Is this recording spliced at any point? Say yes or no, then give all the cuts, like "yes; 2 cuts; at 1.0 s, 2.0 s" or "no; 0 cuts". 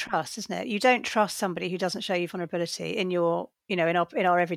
yes; 1 cut; at 3.6 s